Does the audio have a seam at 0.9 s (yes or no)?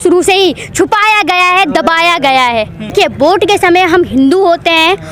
no